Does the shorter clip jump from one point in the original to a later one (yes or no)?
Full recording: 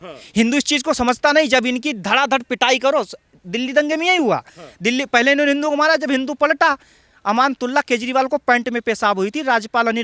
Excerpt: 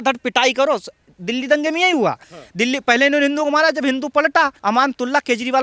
yes